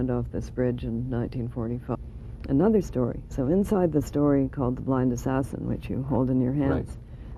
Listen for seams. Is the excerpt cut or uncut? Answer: uncut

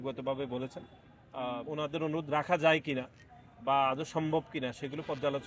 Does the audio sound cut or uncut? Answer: cut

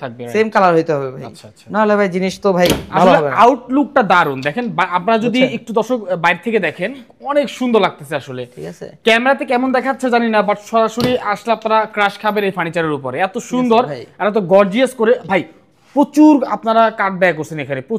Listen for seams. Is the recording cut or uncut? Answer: uncut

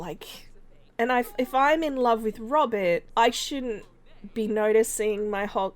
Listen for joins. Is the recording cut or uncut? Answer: cut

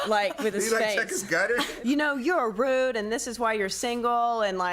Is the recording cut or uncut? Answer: cut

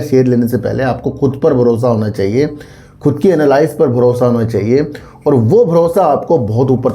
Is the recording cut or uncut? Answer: uncut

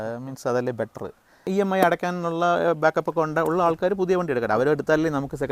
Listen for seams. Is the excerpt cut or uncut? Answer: cut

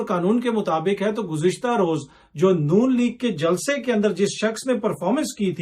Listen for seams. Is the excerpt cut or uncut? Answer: uncut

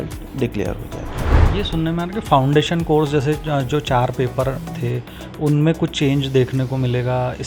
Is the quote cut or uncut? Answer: cut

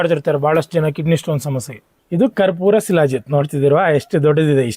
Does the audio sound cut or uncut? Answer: cut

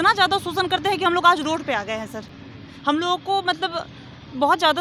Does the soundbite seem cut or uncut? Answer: uncut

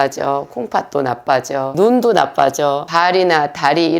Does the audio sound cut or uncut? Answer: cut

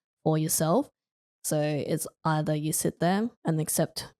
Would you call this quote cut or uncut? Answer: cut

